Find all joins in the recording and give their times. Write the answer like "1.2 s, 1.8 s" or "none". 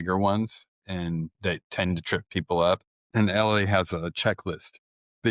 1.1 s, 3.0 s